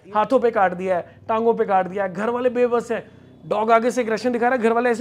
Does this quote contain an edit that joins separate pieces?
no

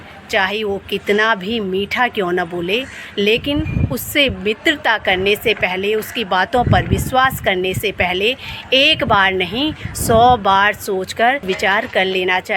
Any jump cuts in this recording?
yes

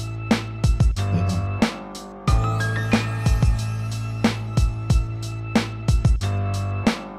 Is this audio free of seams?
no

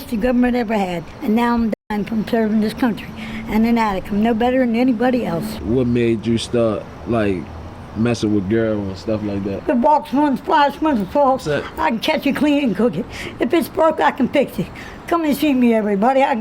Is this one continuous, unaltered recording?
no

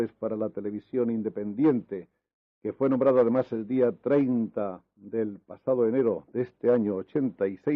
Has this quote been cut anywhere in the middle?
yes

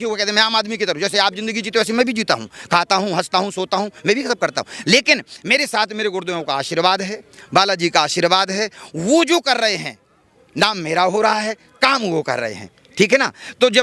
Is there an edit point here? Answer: no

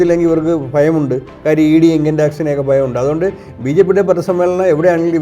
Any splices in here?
no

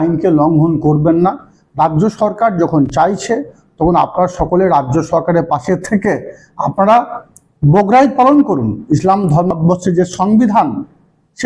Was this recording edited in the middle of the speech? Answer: yes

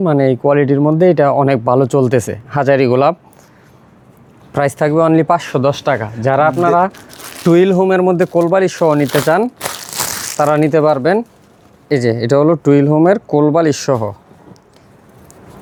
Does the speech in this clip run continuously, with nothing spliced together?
yes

